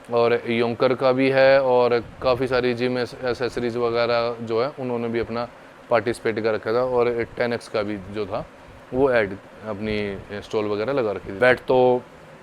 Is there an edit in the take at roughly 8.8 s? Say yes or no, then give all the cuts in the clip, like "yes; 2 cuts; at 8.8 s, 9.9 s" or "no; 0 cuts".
no; 1 cut; at 11.4 s